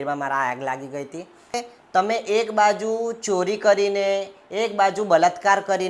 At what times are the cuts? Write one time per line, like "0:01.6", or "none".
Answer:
0:01.6